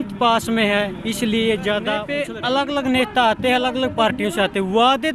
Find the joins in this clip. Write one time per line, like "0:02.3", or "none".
0:02.2